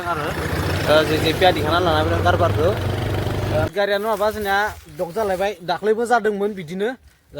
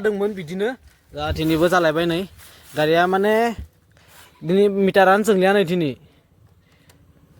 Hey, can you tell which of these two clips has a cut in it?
first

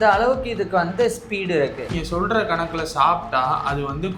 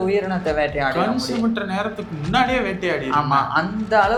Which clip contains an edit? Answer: first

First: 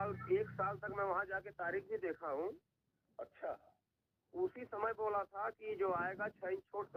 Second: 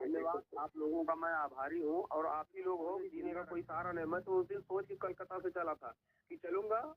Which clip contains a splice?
second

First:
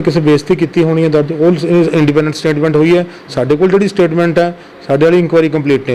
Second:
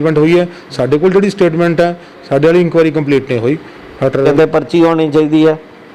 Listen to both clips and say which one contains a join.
second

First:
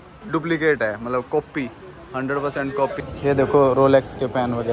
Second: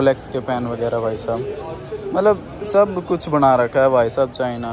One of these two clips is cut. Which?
first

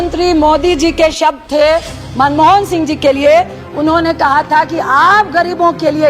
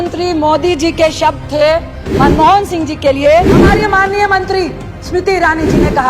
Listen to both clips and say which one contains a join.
second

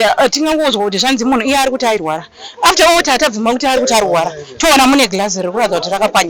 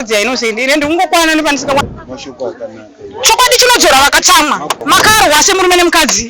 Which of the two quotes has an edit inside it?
second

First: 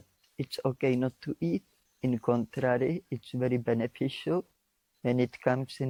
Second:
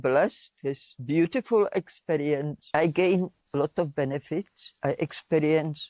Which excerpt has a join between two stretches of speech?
second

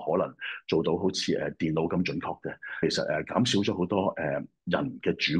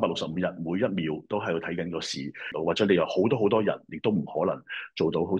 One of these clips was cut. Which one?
second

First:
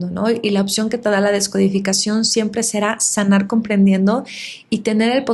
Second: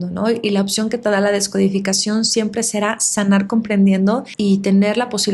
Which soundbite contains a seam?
second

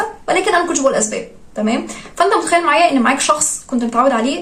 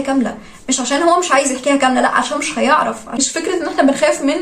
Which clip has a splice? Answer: second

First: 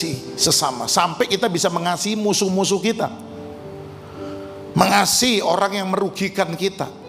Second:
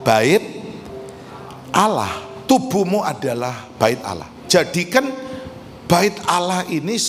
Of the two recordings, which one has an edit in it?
second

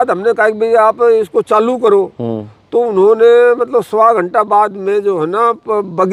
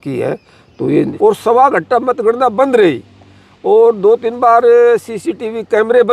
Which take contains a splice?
second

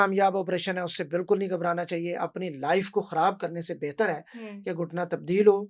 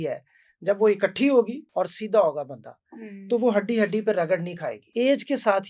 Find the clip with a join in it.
second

